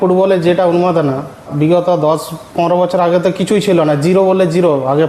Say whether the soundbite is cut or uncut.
cut